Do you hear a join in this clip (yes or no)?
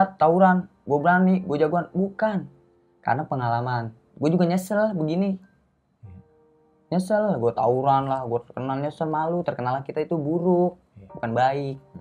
no